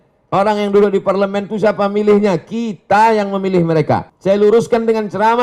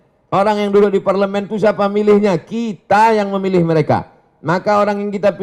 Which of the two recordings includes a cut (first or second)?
first